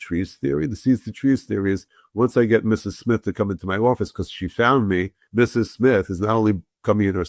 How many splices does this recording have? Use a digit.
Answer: 1